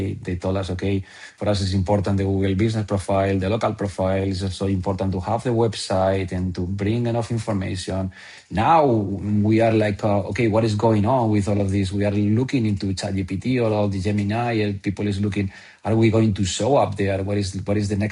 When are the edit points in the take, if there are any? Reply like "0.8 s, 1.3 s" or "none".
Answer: 1.2 s

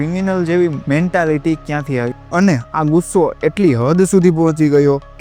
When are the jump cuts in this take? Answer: 2.2 s

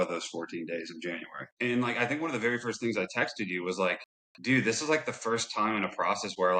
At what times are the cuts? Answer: 1.5 s

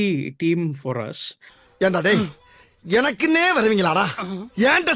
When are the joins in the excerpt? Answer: 1.4 s

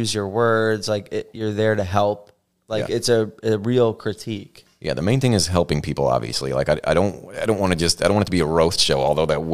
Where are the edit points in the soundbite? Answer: none

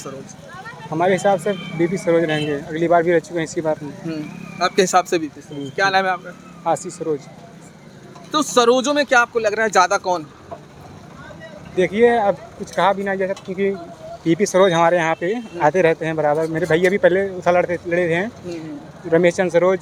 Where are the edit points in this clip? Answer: none

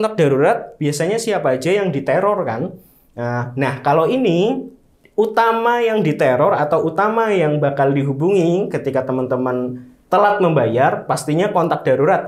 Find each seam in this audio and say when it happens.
none

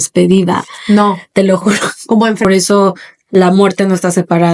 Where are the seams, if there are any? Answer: 2.4 s

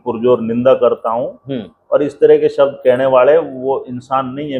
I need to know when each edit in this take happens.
none

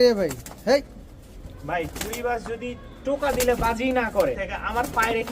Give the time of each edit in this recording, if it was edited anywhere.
4.4 s

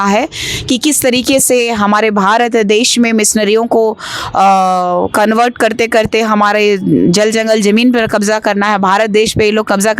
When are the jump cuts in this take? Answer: none

